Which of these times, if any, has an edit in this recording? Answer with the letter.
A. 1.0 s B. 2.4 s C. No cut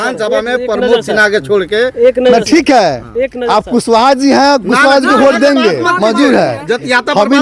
C